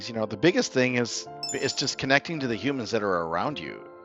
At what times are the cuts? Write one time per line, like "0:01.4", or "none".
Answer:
none

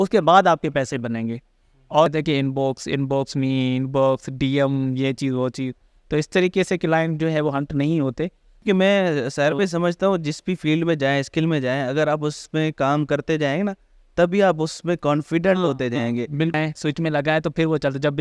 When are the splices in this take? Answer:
0:02.1
0:08.5
0:16.5

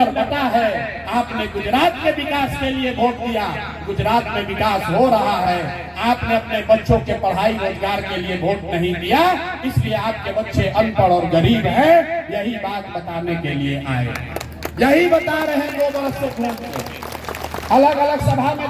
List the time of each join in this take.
none

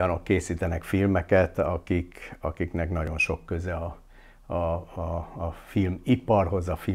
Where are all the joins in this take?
none

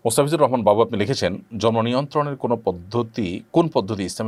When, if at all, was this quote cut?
none

